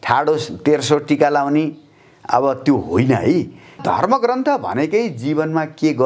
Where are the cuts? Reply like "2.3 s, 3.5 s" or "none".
3.8 s